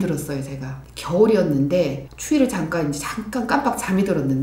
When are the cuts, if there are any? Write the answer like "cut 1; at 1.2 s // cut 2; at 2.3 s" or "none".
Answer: cut 1; at 2.0 s